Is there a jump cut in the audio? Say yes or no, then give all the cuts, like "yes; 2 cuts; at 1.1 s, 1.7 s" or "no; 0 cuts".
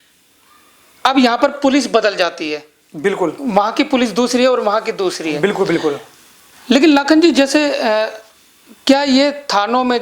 no; 0 cuts